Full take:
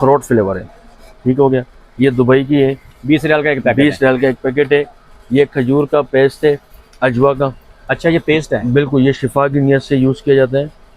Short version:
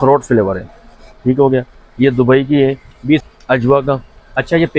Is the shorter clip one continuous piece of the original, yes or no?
no